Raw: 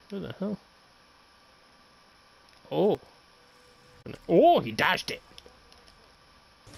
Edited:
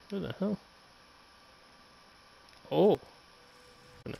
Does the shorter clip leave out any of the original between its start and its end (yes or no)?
no